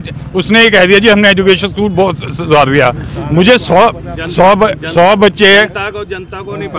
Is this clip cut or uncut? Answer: uncut